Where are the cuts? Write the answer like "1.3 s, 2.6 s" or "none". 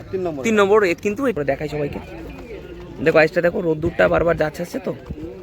1.3 s